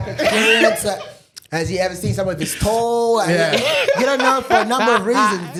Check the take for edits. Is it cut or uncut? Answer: uncut